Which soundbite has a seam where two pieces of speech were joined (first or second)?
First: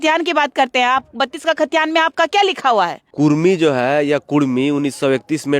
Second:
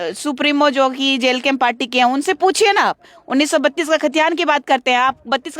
first